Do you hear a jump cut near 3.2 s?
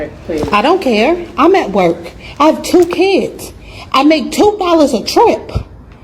no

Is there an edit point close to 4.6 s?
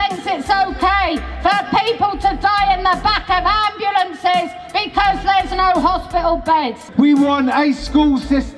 no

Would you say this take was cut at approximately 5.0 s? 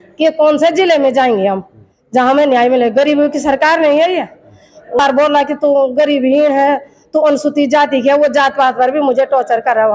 yes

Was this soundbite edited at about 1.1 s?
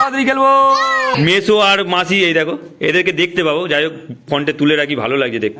yes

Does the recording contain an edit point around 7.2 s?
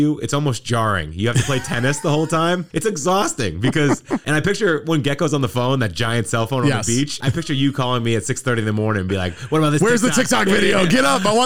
yes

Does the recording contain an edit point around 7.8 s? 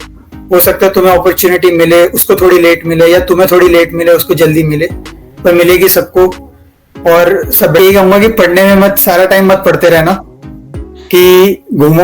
yes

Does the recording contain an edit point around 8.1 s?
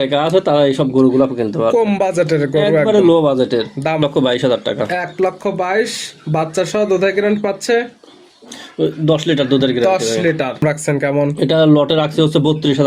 no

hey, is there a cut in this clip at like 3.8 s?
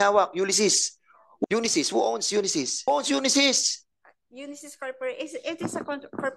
no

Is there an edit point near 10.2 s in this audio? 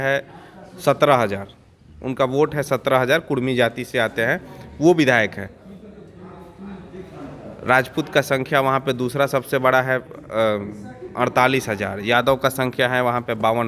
no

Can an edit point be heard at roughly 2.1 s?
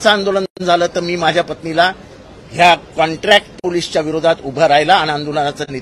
no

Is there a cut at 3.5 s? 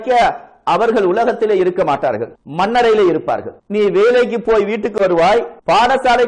no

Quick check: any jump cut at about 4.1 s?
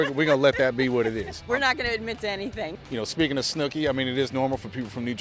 no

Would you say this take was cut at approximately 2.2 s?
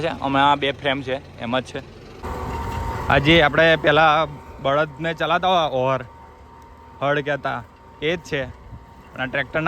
yes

